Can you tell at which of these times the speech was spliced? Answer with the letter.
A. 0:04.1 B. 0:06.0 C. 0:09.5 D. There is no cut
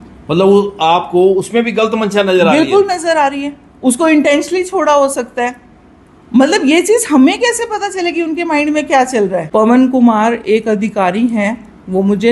C